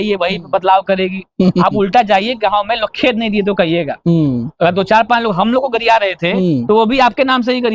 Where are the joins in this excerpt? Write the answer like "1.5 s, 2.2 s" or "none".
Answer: none

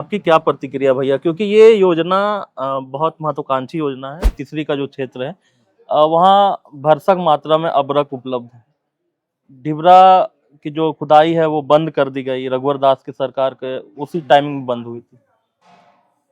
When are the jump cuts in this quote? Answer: 4.3 s

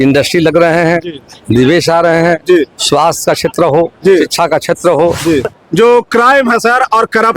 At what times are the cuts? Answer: 5.6 s

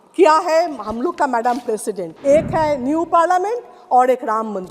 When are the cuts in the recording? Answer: 2.1 s

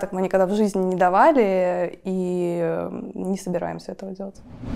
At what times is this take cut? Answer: none

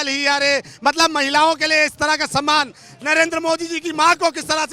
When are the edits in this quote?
none

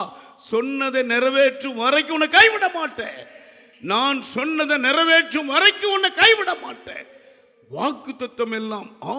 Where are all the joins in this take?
none

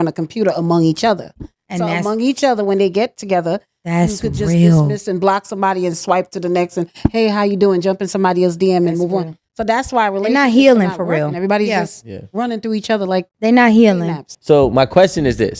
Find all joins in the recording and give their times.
none

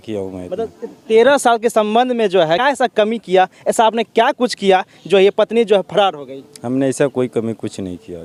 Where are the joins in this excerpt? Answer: none

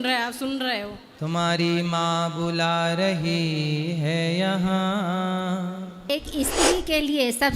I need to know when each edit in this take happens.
6.0 s

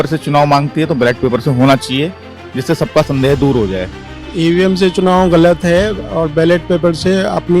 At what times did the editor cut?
3.9 s

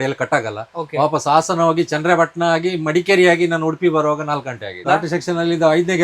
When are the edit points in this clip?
4.8 s

